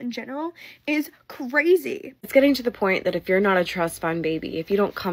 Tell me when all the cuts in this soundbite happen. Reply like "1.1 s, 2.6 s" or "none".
2.2 s